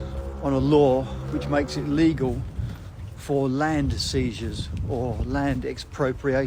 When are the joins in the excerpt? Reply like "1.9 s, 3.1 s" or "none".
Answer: none

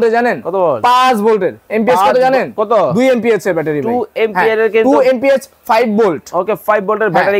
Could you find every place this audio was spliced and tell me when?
none

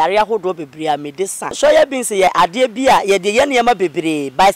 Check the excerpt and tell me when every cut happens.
1.6 s, 2.3 s

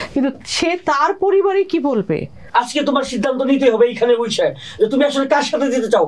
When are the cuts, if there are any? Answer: 2.4 s

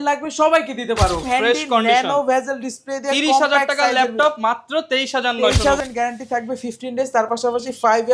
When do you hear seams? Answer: 1.2 s, 5.8 s

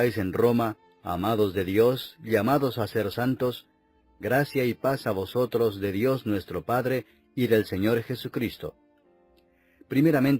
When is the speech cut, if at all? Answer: 7.8 s

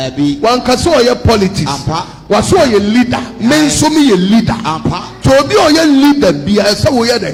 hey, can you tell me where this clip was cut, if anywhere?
none

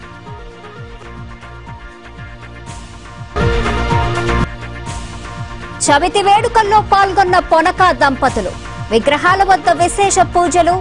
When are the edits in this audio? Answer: none

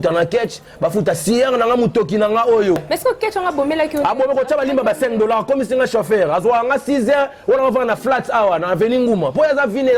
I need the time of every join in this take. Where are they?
2.8 s

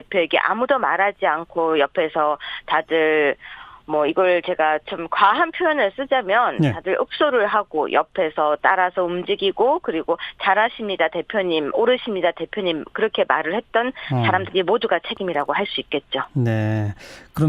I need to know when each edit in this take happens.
1.4 s

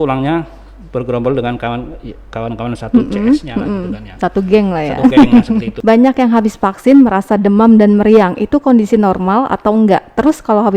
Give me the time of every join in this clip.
5.7 s

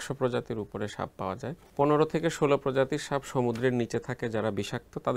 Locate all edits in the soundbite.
1.6 s

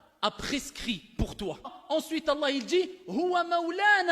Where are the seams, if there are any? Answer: 1.7 s

